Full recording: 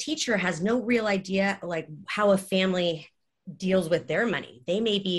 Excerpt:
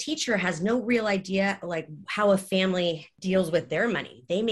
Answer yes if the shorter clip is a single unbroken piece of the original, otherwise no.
no